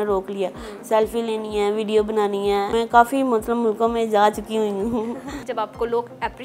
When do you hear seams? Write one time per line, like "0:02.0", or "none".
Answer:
0:02.7
0:05.4